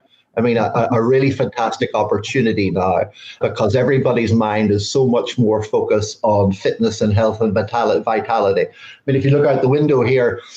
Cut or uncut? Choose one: cut